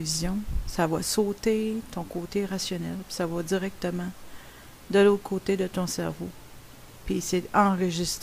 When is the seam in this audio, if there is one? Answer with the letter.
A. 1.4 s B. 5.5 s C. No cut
A